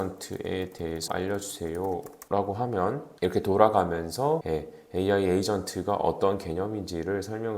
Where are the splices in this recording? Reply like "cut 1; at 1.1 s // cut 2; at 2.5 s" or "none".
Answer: cut 1; at 1.1 s // cut 2; at 2.1 s // cut 3; at 3.1 s // cut 4; at 4.4 s